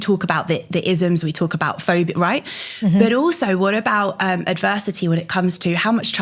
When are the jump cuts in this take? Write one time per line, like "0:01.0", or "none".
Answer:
none